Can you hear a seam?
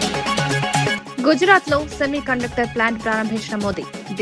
yes; 1 cut; at 0.9 s

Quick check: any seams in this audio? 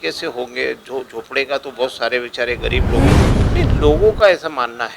yes; 1 cut; at 3.2 s

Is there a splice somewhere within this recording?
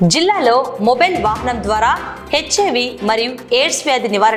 no; 0 cuts

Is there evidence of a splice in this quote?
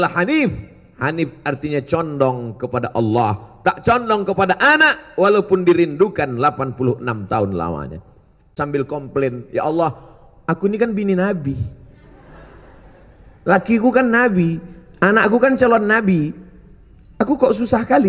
yes; 1 cut; at 8.5 s

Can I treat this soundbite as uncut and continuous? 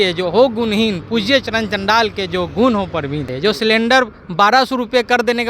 no; 1 cut; at 3.3 s

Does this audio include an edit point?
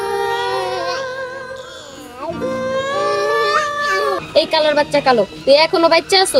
yes; 1 cut; at 4.2 s

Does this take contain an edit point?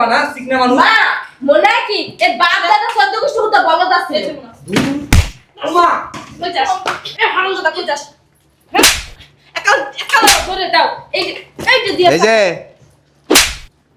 no; 0 cuts

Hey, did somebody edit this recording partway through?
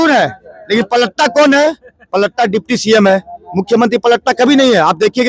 no; 0 cuts

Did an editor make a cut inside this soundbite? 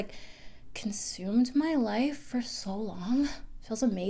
no; 0 cuts

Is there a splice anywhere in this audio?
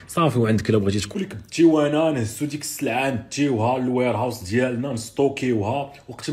yes; 1 cut; at 1.1 s

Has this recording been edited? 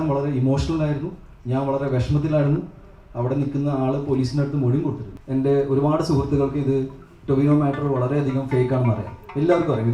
yes; 1 cut; at 5.1 s

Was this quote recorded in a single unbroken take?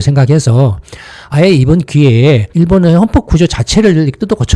yes; 0 cuts

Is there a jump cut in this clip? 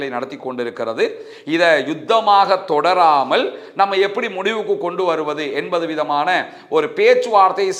no; 0 cuts

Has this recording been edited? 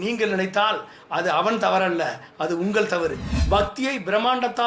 yes; 1 cut; at 3.3 s

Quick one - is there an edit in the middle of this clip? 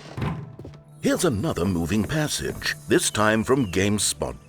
yes; 1 cut; at 0.9 s

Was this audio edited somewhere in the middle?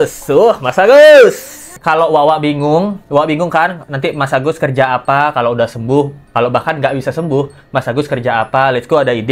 yes; 1 cut; at 1.7 s

